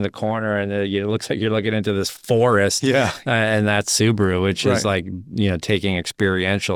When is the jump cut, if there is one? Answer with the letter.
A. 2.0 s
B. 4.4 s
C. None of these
C